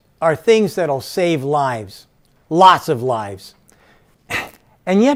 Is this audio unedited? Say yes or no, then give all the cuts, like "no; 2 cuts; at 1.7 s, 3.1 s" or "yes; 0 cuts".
yes; 0 cuts